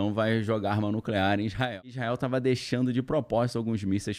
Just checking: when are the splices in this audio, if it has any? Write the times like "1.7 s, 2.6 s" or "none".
1.7 s